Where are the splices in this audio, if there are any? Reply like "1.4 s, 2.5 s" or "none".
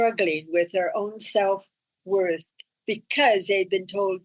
none